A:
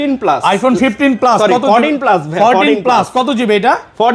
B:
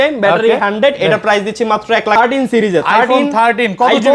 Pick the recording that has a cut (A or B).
B